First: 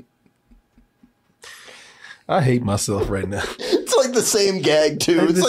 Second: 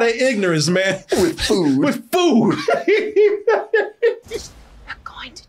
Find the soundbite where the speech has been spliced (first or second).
second